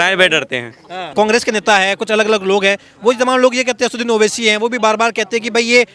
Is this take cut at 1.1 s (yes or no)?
yes